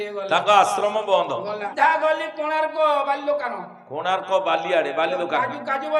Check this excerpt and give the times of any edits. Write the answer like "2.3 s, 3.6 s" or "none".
1.6 s